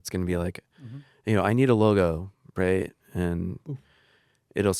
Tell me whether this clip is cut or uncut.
uncut